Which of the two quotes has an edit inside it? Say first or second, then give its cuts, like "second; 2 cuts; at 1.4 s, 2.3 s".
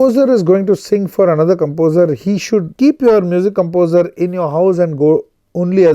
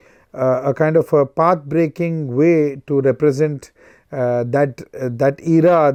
first; 1 cut; at 2.7 s